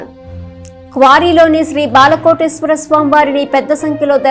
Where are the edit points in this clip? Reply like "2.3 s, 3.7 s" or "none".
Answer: none